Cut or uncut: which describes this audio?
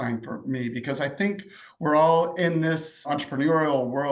cut